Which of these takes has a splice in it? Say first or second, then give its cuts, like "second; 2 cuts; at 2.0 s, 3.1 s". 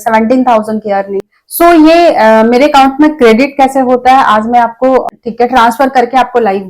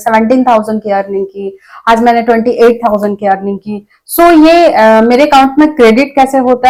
first; 2 cuts; at 1.4 s, 5.1 s